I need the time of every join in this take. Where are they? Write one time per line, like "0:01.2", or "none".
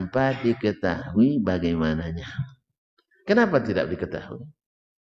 none